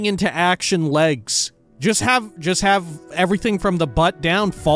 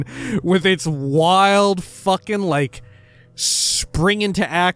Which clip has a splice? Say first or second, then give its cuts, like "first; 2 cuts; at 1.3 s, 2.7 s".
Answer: first; 1 cut; at 1.6 s